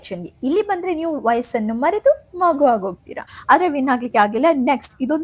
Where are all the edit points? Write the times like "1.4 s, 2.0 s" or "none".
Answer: 3.3 s